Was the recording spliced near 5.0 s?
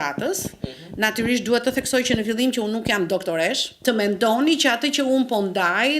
no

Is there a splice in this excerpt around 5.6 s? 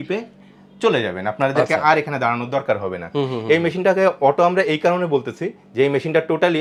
no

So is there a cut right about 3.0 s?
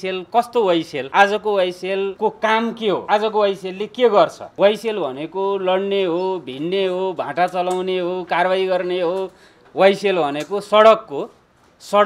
yes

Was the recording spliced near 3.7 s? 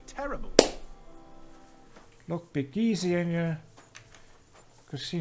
no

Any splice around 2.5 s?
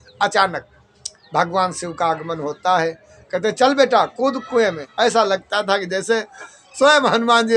no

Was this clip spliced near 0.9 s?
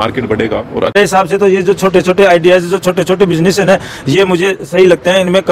yes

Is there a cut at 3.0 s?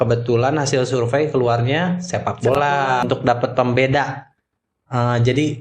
yes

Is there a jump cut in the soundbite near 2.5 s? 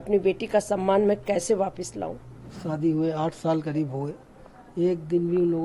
yes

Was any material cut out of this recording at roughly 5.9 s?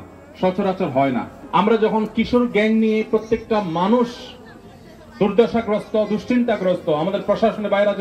no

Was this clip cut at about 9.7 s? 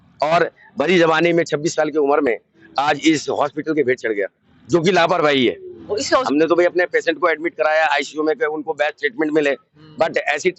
no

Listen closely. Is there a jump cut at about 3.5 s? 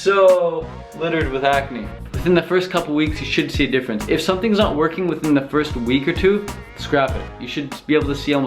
no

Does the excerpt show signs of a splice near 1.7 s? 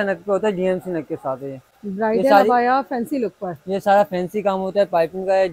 no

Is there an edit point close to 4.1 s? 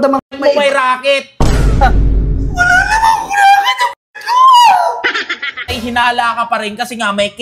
no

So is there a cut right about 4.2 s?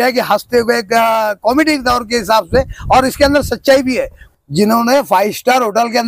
yes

